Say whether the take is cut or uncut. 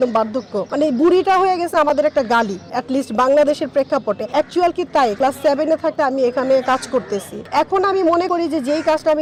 uncut